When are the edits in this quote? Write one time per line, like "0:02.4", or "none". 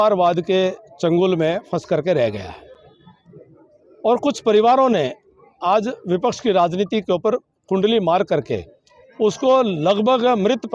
none